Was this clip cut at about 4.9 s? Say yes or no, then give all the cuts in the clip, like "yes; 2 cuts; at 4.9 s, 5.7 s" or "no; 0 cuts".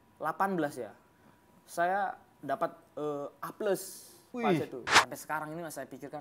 yes; 1 cut; at 4.9 s